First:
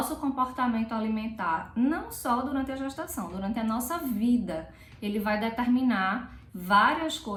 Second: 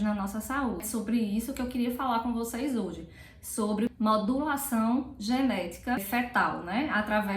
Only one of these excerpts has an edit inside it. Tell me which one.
second; 3 cuts; at 0.9 s, 3.9 s, 6.0 s

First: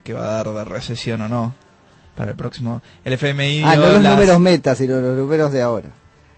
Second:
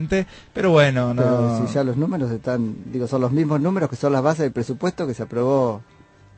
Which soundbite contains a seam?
second; 1 cut; at 2.8 s

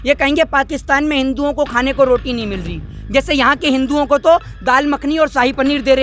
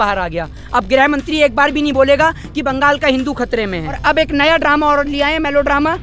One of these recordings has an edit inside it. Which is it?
second; 1 cut; at 4.0 s

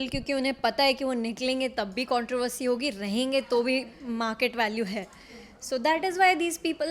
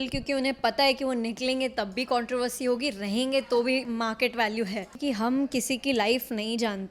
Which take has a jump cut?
second; 2 cuts; at 3.9 s, 5.0 s

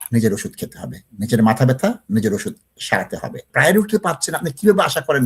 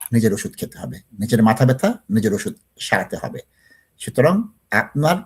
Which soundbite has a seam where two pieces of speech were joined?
first; 1 cut; at 3.4 s

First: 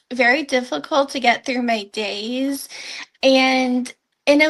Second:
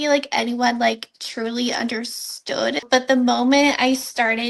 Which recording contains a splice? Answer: second; 1 cut; at 2.8 s

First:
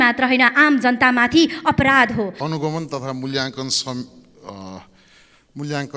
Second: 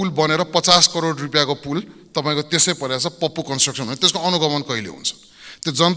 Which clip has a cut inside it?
first; 1 cut; at 2.4 s

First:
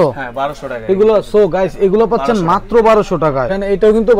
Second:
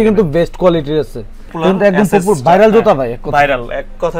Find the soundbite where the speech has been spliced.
second; 1 cut; at 1.5 s

